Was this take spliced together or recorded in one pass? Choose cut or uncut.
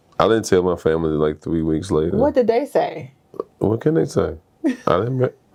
uncut